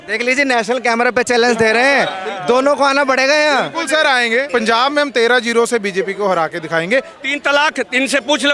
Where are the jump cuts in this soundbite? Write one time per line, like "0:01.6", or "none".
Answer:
0:04.5
0:07.1